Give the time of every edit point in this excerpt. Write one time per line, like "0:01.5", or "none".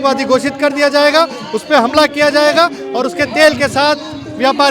none